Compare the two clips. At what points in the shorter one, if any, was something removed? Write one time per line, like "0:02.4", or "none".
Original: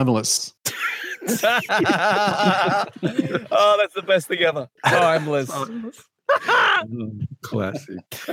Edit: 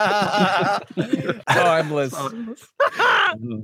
0:01.3
0:02.6